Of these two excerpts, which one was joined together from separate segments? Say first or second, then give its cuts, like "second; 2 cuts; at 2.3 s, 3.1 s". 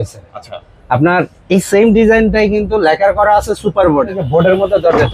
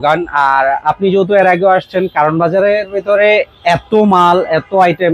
first; 1 cut; at 4.2 s